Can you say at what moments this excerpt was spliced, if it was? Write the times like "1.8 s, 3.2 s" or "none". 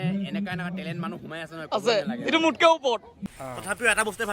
3.2 s